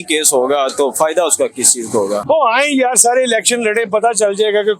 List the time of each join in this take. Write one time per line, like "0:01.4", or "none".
0:02.2